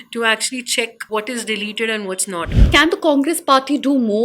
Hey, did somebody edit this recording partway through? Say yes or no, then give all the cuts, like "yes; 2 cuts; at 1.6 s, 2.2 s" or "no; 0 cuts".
yes; 2 cuts; at 1.0 s, 2.7 s